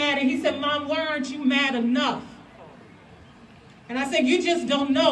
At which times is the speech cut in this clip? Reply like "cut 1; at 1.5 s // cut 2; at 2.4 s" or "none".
none